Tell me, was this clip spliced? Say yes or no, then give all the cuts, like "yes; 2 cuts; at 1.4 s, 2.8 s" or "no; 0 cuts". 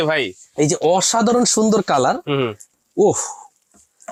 no; 0 cuts